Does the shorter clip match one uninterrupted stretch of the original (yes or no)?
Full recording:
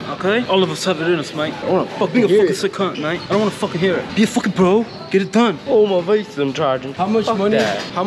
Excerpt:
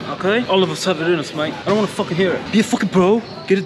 no